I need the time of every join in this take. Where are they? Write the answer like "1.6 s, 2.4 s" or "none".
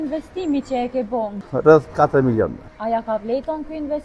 1.4 s, 2.6 s